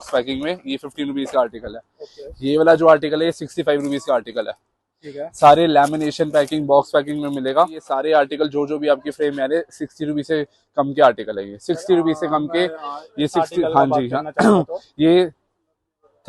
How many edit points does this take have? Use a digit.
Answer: 1